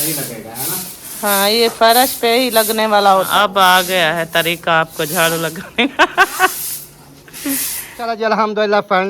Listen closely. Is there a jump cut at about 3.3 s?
yes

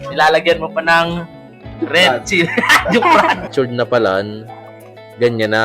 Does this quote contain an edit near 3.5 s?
yes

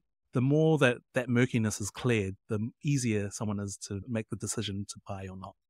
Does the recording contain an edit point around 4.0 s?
yes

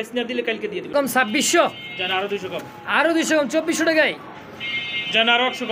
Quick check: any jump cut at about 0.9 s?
yes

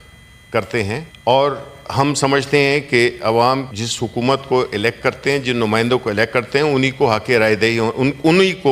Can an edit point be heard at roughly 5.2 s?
no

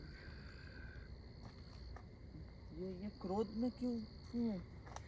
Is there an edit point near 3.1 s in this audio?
no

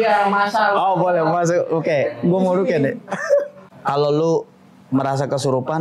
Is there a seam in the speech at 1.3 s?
no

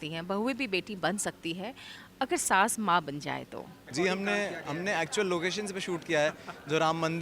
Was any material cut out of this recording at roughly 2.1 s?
no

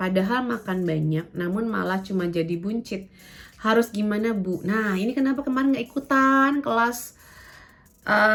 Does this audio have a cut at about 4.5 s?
no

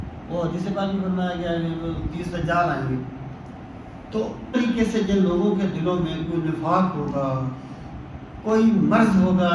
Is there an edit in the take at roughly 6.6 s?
no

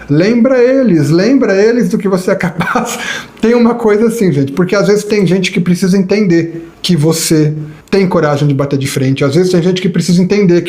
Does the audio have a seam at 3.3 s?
no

